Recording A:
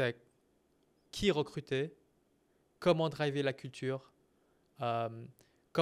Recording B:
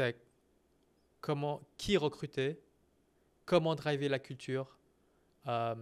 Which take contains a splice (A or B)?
A